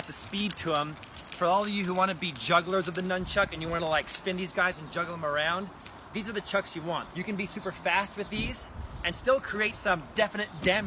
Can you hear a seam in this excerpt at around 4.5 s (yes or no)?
no